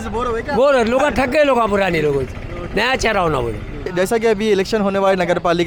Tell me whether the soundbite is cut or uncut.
uncut